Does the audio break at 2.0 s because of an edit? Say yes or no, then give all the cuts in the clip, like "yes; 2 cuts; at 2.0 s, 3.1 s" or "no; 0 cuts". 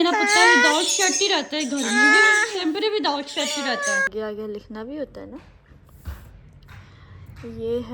no; 1 cut; at 4.1 s